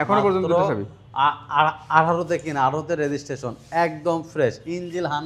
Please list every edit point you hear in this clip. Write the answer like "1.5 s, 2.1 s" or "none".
none